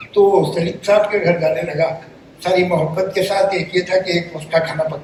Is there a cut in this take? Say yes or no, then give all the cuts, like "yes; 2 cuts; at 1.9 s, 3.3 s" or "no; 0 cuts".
no; 0 cuts